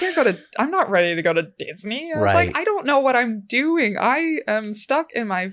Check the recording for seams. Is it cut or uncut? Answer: uncut